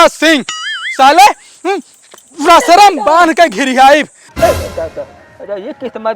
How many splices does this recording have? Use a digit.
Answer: 1